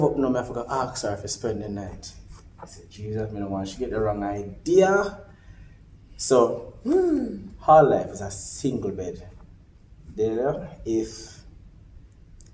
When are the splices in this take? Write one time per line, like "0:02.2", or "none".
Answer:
0:02.4